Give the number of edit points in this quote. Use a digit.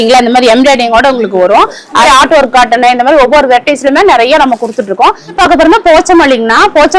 2